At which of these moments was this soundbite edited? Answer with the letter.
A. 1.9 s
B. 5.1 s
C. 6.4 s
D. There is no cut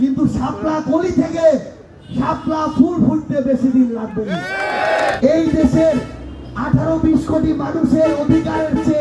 B